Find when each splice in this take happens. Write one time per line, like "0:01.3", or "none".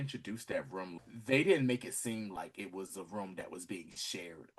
0:01.0